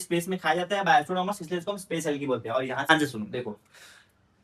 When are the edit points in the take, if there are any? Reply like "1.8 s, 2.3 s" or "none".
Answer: 2.9 s